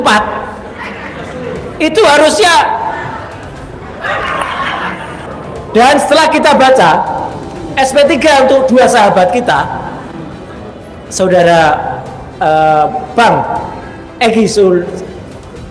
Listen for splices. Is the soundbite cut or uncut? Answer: cut